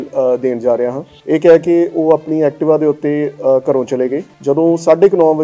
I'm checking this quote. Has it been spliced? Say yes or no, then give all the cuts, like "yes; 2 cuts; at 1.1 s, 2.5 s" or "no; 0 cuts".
yes; 2 cuts; at 1.1 s, 4.3 s